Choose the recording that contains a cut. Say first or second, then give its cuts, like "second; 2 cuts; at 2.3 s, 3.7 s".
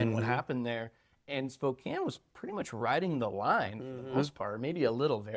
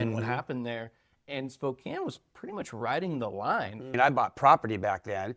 second; 1 cut; at 3.9 s